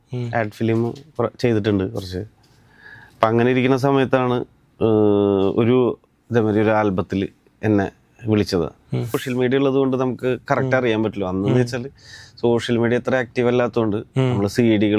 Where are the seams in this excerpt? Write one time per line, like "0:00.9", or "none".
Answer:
0:09.2